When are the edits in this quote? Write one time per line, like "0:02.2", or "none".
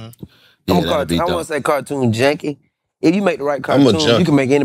none